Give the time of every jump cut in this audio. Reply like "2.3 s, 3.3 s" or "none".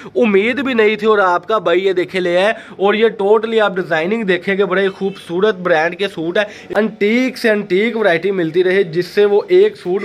6.5 s